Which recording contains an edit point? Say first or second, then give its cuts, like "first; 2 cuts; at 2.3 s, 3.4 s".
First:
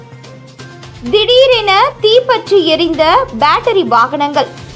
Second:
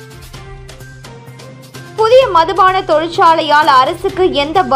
second; 1 cut; at 1.5 s